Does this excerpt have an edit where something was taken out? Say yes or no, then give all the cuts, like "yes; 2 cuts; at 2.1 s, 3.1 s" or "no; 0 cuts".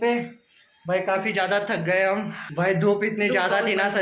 no; 0 cuts